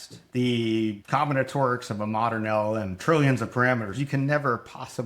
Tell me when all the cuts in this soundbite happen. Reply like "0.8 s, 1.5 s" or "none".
1.0 s